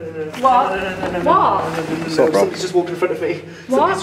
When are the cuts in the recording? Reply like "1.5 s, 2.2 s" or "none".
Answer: none